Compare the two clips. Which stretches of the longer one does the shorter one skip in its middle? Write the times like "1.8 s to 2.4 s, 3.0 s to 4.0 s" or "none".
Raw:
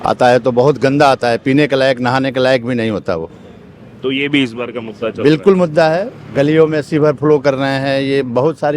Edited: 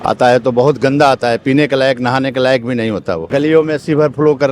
3.2 s to 6.3 s